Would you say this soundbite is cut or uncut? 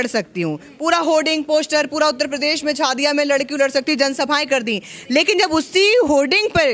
uncut